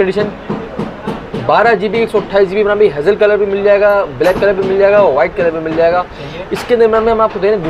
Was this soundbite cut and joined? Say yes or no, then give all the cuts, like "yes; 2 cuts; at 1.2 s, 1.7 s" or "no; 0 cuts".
no; 0 cuts